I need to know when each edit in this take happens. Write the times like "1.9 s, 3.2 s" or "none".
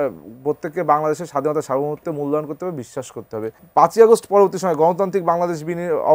3.6 s